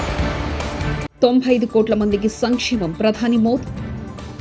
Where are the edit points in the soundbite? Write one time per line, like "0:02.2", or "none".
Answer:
0:01.1